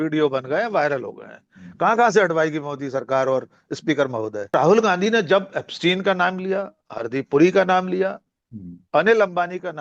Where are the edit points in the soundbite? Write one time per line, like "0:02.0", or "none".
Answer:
0:04.5